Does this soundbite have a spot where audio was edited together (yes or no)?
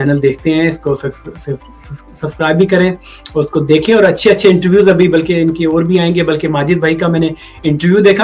no